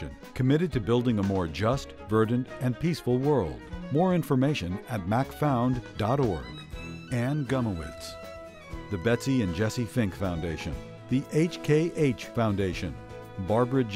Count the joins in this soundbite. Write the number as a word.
zero